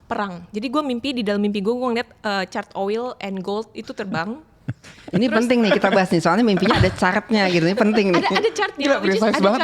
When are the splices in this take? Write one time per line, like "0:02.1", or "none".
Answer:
none